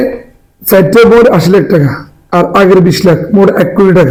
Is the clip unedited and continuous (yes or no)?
yes